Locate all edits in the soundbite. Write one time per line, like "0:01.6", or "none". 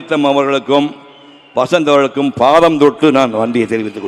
none